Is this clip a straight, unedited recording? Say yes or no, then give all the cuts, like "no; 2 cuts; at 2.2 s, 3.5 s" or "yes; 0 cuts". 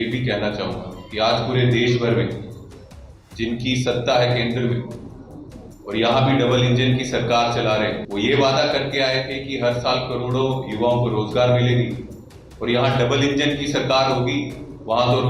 no; 1 cut; at 8.0 s